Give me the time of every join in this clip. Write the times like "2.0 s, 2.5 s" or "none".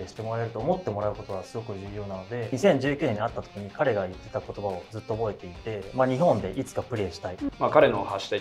2.5 s, 7.4 s